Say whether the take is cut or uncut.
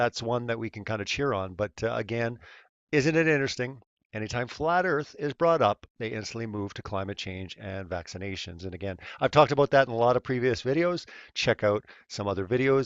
uncut